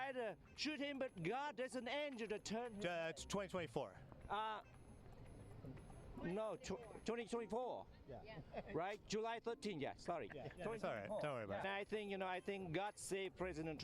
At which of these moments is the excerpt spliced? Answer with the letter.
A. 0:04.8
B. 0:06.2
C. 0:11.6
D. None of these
C